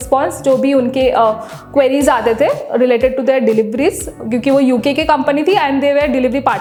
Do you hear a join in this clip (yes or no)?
no